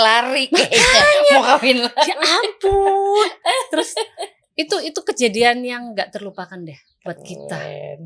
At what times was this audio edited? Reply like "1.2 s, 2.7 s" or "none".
none